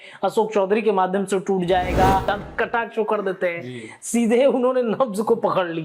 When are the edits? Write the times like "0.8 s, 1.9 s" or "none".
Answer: 2.3 s